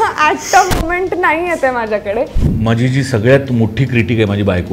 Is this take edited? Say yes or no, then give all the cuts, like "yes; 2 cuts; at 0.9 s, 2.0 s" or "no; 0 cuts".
yes; 1 cut; at 2.5 s